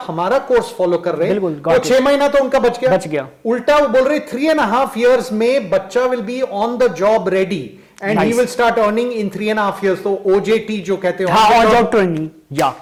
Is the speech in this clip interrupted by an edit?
no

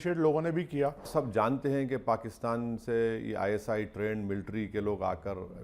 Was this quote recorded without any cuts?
no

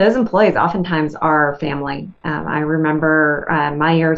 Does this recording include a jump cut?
no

